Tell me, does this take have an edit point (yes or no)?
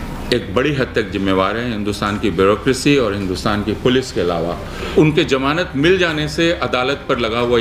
yes